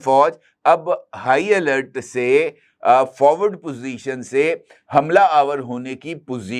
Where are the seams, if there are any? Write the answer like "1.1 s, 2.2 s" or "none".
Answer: none